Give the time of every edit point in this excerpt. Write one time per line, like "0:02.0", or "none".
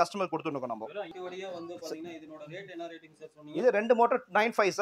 0:01.1